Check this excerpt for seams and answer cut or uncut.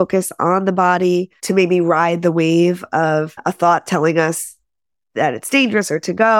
uncut